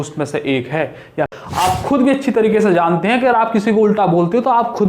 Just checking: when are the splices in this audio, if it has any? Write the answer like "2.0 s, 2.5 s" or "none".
1.3 s